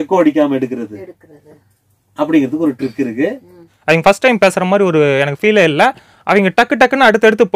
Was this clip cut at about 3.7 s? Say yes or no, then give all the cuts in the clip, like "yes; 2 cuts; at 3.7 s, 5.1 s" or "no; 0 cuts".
yes; 1 cut; at 3.7 s